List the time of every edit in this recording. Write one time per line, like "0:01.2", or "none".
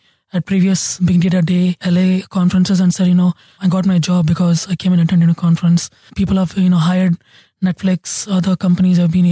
0:00.9
0:01.8
0:03.6
0:06.1